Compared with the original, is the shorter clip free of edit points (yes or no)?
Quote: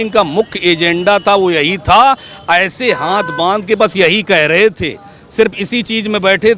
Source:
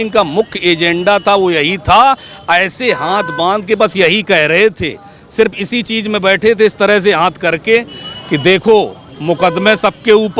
yes